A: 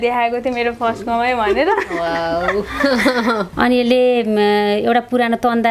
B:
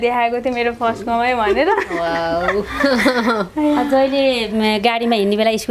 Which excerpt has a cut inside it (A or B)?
A